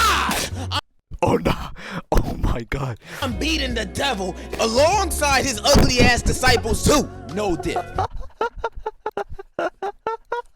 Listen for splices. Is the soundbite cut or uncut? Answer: uncut